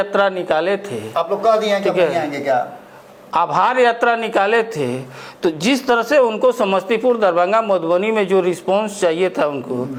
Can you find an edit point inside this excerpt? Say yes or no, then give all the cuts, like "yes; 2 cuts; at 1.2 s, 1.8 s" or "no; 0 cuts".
no; 0 cuts